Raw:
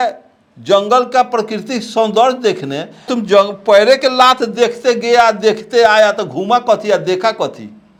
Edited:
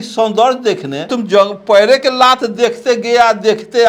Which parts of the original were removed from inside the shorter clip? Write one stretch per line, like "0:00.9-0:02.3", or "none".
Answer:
0:02.8-0:03.0